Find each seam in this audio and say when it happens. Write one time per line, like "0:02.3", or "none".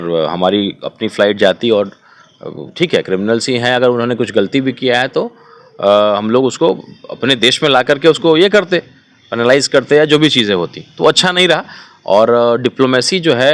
none